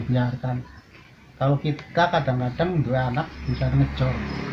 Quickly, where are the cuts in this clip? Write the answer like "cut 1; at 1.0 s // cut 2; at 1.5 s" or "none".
none